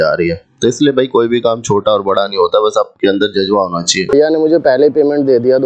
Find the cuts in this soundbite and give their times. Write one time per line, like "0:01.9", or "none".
0:04.1